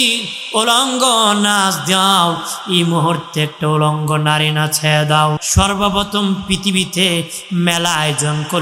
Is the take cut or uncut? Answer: cut